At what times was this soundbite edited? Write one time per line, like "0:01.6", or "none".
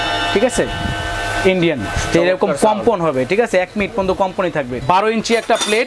0:04.8